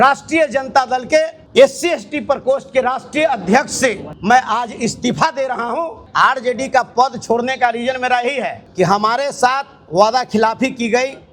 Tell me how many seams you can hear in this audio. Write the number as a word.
four